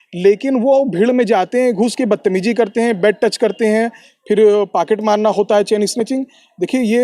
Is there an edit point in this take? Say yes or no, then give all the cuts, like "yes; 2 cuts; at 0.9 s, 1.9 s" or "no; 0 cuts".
no; 0 cuts